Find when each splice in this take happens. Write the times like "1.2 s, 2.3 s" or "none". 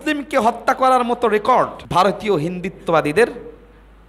1.8 s